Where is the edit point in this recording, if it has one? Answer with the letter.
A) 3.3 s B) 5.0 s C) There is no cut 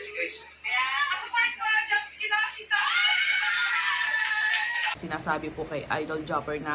B